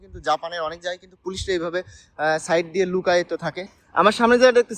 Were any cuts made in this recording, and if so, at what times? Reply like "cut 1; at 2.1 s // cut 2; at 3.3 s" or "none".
cut 1; at 3.6 s